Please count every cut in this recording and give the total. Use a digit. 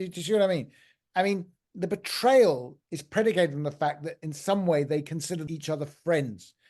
1